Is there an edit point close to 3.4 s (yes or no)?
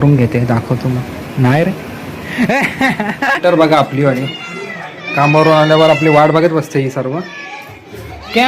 yes